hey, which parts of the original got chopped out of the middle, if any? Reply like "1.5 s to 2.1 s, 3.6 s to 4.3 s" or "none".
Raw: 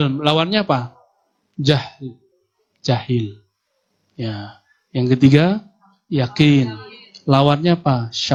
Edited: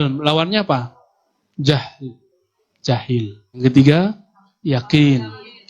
3.6 s to 5.1 s